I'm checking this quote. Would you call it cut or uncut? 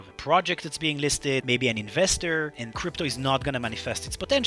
cut